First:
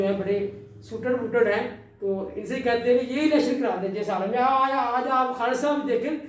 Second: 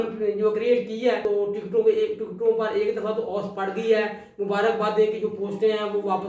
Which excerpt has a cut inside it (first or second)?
second